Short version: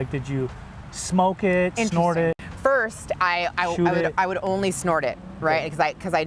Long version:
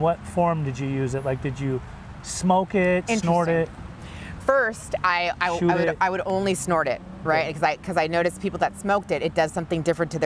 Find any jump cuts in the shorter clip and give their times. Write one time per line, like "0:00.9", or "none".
0:02.5